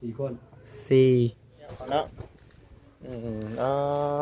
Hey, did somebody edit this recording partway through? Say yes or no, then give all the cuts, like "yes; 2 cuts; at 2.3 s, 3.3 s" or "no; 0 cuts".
yes; 1 cut; at 1.8 s